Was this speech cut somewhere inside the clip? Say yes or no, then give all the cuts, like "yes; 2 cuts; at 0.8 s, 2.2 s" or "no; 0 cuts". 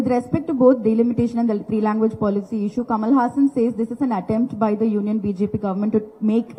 no; 0 cuts